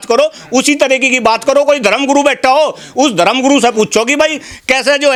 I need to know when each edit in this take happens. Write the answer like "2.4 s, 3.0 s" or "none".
none